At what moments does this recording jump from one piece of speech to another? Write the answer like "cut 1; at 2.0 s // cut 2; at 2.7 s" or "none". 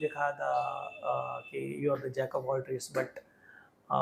none